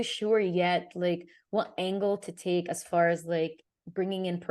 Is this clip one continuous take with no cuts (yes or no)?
yes